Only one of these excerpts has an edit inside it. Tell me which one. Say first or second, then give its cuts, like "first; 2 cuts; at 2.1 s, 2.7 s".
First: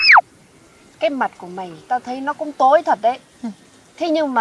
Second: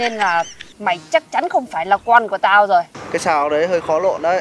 second; 1 cut; at 3.0 s